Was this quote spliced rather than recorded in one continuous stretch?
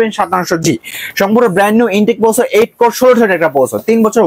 no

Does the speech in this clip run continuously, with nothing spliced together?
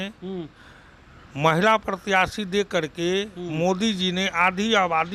yes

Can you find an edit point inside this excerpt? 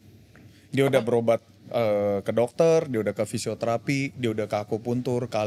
no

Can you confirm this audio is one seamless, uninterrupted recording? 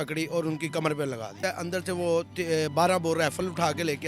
no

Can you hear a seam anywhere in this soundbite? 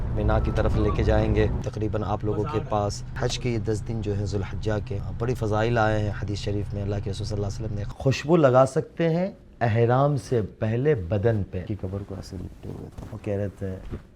yes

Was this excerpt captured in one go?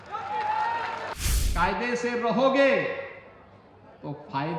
no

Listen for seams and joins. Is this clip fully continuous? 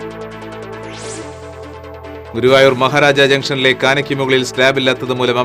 no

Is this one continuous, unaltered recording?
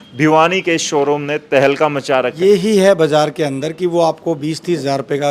no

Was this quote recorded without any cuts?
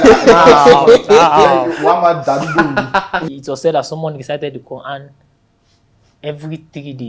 no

